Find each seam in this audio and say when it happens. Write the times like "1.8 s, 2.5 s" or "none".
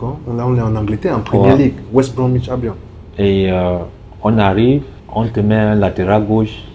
5.0 s